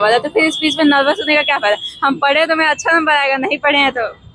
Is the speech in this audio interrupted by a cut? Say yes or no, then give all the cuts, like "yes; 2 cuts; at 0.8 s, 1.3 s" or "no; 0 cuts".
no; 0 cuts